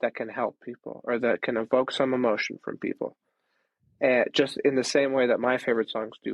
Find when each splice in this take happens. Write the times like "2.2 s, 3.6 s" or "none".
none